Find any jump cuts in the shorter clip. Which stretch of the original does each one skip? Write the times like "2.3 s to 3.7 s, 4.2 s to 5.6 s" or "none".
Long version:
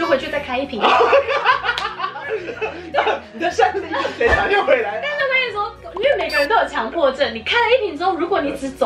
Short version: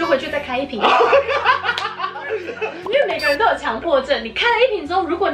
2.7 s to 5.8 s